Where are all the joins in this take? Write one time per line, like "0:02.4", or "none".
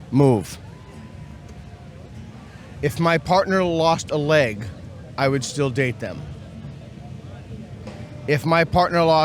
0:02.3
0:07.8